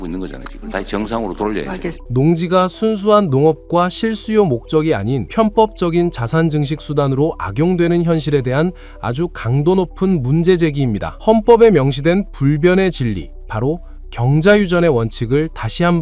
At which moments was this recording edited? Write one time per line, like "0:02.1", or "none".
0:01.9
0:05.2
0:11.1